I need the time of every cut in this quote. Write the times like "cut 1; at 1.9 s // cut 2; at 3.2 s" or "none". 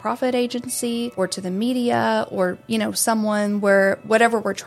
cut 1; at 1.1 s